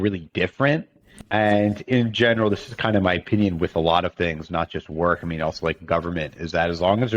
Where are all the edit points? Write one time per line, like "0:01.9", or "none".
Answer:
0:01.1